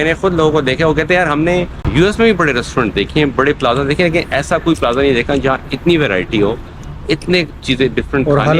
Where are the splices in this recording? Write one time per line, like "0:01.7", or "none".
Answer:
0:01.8